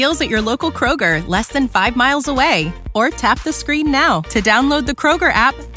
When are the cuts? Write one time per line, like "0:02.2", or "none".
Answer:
none